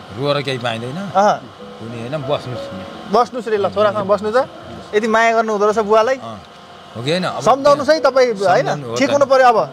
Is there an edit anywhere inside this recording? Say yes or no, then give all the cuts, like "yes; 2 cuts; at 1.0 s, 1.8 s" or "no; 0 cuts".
no; 0 cuts